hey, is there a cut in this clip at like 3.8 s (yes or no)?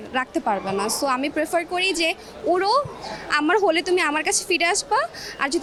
no